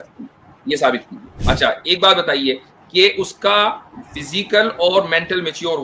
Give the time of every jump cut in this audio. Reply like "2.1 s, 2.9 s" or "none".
1.3 s